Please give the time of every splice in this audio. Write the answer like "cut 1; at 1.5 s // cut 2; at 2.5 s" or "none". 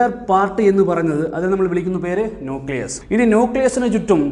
cut 1; at 2.9 s